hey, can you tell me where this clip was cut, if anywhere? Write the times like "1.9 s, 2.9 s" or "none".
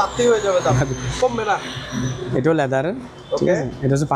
none

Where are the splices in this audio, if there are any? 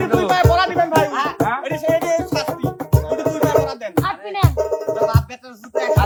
none

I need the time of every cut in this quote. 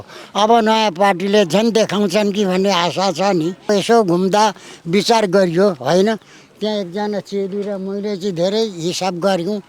3.7 s

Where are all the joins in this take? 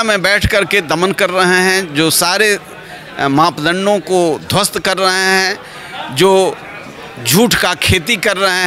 none

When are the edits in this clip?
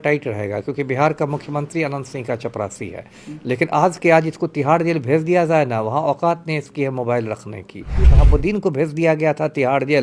8.1 s

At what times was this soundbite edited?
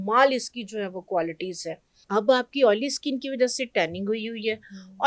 1.9 s

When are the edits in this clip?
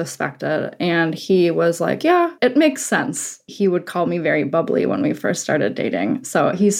2.4 s, 3.5 s

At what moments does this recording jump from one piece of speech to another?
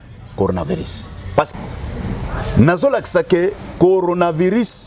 1.5 s

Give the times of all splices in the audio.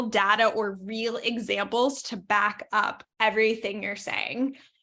3.0 s

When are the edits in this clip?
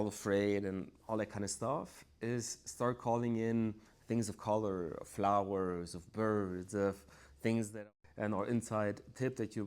7.7 s

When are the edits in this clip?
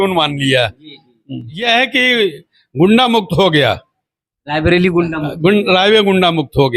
1.6 s

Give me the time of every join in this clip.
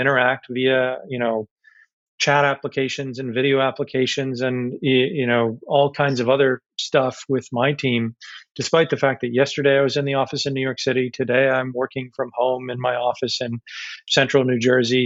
none

